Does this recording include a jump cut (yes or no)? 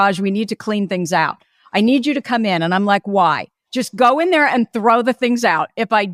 no